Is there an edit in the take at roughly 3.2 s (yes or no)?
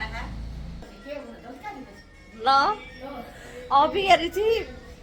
no